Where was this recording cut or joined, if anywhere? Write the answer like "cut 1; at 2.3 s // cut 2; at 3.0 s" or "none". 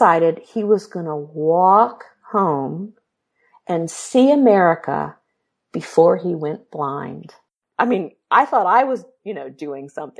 cut 1; at 7.6 s